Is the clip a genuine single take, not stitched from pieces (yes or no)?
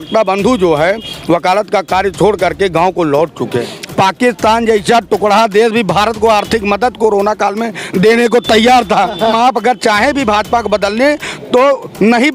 no